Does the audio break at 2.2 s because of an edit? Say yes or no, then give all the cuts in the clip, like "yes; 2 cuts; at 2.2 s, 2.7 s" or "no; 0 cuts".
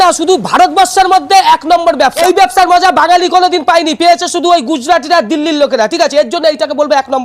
yes; 1 cut; at 2.2 s